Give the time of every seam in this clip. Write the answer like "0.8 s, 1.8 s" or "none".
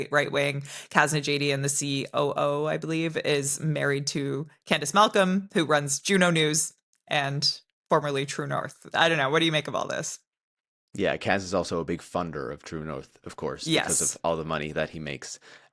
none